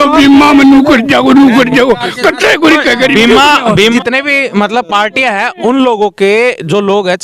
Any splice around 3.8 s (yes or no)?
yes